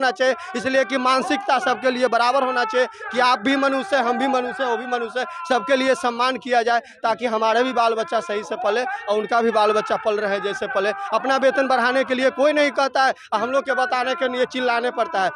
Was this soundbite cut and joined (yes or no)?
no